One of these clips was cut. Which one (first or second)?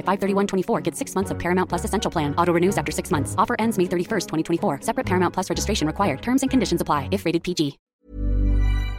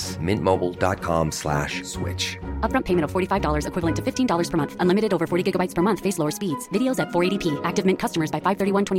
first